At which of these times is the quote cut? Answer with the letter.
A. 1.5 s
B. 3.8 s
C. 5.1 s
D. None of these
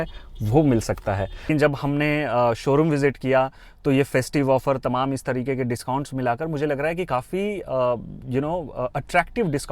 A